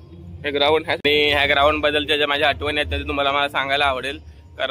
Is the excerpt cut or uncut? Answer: cut